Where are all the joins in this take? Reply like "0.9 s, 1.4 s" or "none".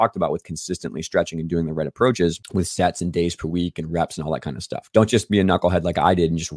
2.4 s, 4.7 s